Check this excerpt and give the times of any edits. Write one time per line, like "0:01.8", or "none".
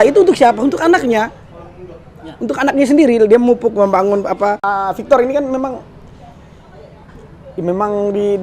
0:04.7